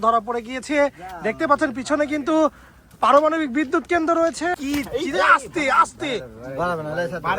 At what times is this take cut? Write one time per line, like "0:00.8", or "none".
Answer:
0:04.6